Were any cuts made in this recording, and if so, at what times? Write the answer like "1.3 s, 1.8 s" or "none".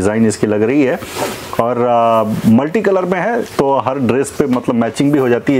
none

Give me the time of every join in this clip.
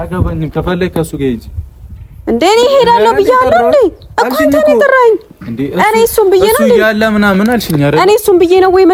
none

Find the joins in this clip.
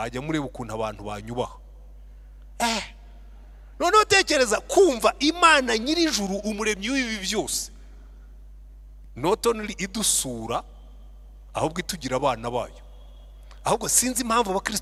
none

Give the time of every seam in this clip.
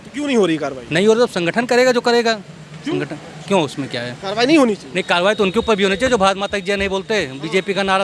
none

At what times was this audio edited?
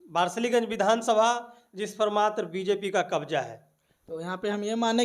none

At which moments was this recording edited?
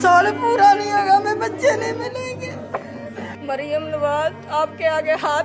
3.3 s

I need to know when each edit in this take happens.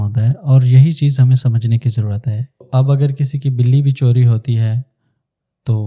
2.7 s

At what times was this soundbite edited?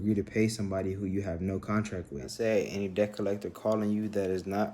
2.1 s

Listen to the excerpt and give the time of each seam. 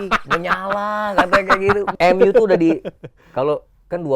2.0 s

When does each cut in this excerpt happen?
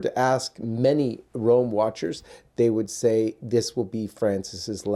none

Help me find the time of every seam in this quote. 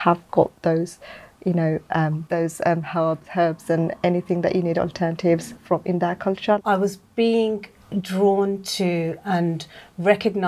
2.2 s, 5.5 s, 6.6 s

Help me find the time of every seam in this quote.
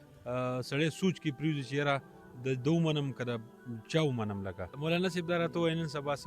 4.8 s

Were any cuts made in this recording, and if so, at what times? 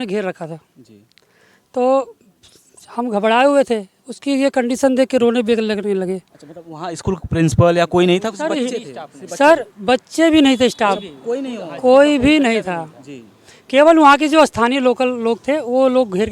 none

